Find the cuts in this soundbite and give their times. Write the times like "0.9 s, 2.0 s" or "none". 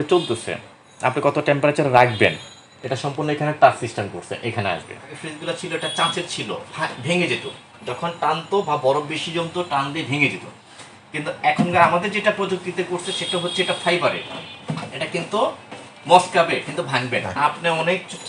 5.2 s, 17.3 s